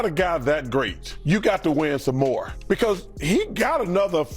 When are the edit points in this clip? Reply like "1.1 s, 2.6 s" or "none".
1.1 s, 2.5 s